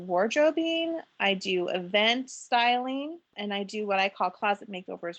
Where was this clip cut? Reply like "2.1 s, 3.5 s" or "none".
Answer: 3.3 s